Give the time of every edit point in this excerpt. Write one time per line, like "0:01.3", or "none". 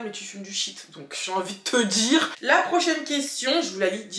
0:02.3